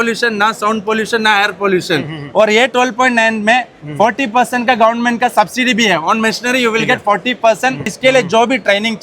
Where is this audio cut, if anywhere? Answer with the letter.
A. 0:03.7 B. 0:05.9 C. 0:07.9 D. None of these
C